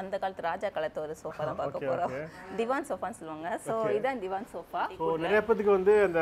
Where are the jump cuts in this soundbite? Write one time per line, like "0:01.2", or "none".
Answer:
0:05.0